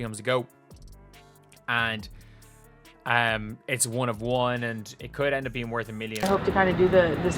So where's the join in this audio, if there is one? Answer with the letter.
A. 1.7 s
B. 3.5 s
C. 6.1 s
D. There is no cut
C